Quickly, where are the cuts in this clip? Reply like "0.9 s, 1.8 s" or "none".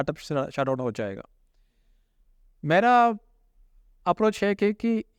none